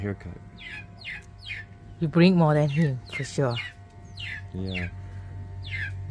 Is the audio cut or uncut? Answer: uncut